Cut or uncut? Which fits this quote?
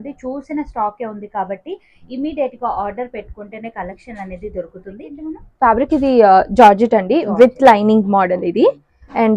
cut